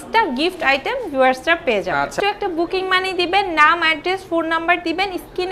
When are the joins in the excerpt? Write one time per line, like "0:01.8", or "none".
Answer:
0:02.1